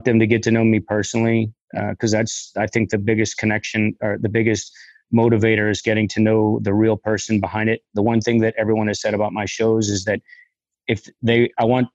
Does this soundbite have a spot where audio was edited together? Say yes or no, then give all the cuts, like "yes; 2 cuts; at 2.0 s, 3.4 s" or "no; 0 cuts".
no; 0 cuts